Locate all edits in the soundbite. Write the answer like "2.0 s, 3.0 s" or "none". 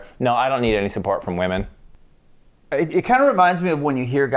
1.8 s